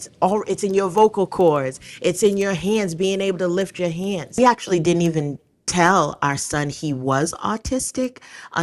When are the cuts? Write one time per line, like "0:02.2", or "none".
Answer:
0:04.4

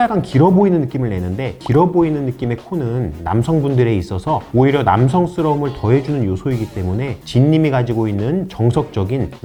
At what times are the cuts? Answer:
none

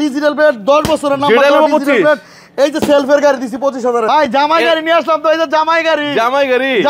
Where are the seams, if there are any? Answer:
0:04.1

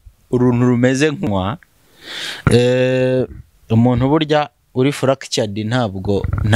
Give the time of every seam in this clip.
0:01.3

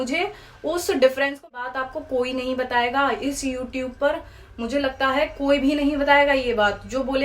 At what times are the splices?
0:01.7

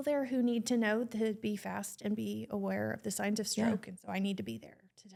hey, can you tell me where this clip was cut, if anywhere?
none

